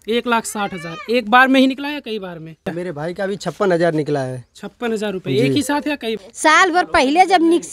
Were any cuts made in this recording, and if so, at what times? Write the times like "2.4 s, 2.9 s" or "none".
2.7 s, 6.2 s